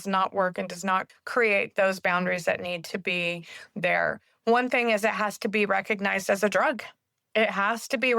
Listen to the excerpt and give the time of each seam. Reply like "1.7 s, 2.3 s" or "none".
1.2 s